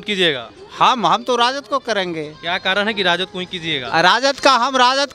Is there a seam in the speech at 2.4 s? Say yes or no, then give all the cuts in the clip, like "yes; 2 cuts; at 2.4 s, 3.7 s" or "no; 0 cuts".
no; 0 cuts